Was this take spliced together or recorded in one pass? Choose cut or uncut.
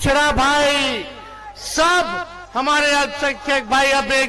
uncut